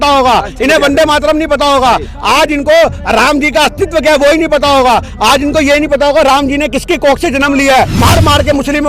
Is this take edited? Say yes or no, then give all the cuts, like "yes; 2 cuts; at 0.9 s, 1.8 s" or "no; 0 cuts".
yes; 1 cut; at 8.0 s